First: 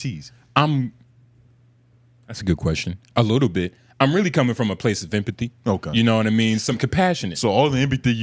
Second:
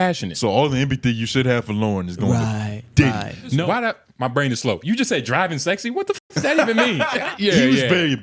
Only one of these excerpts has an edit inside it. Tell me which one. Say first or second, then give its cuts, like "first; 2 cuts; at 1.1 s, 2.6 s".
second; 2 cuts; at 3.6 s, 7.2 s